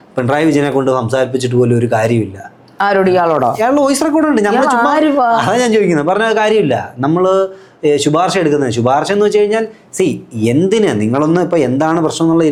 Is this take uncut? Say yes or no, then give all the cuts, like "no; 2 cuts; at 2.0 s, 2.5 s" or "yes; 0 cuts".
yes; 0 cuts